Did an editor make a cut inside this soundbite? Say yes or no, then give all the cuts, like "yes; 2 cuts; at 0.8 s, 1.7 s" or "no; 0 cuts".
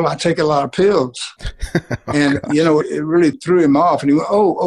yes; 1 cut; at 3.1 s